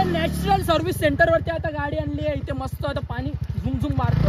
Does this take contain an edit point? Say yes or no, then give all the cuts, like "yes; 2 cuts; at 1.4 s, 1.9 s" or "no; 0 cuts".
no; 0 cuts